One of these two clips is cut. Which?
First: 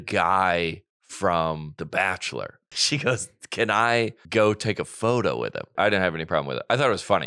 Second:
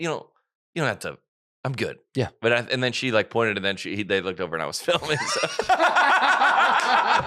first; 4 cuts; at 1.7 s, 2.7 s, 4.2 s, 5.7 s

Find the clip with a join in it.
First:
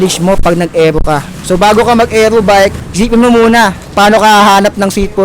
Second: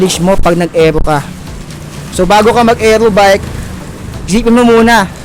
first; 3 cuts; at 1.3 s, 2.8 s, 3.8 s

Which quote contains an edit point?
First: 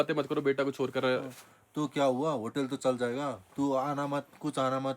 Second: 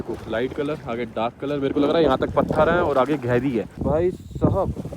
second; 1 cut; at 3.7 s

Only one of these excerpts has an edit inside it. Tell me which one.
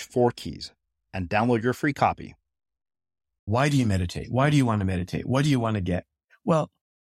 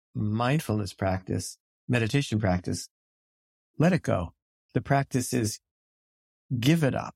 first; 1 cut; at 3.5 s

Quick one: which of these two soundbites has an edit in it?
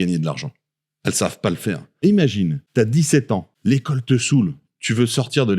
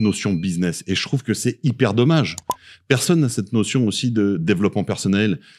first; 3 cuts; at 2.0 s, 2.6 s, 3.5 s

